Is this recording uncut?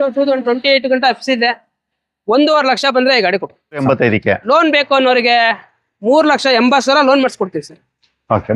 no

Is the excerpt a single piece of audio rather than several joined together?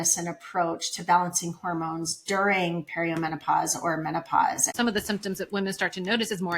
no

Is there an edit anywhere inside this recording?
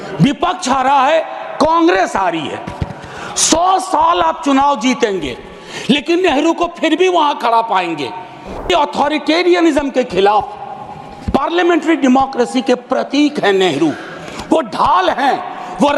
yes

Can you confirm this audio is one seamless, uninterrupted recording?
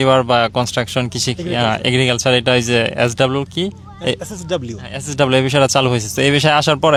yes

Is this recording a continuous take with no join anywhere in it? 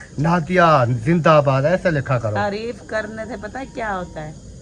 yes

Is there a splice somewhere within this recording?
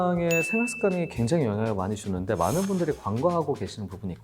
no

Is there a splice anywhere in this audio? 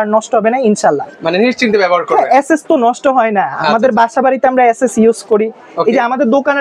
no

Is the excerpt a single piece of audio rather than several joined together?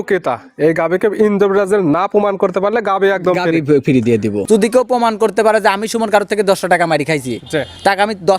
no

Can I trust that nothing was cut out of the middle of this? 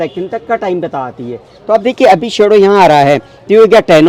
yes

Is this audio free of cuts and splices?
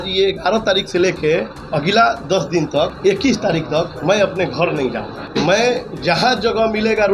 no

